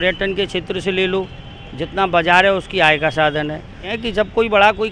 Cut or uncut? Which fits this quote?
cut